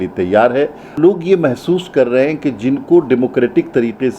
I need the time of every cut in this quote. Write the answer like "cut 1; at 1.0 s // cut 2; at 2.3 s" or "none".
cut 1; at 0.9 s